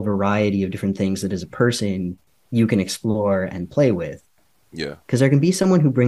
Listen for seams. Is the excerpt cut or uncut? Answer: cut